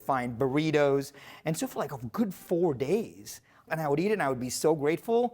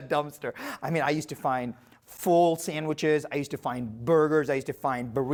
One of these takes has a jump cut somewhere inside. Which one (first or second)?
first